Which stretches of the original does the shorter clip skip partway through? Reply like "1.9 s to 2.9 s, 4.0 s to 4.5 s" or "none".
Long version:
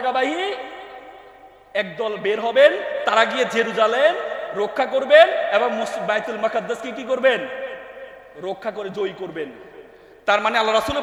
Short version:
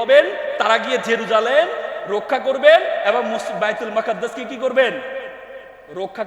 none